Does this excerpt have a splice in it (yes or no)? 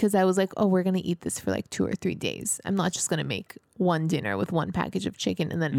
no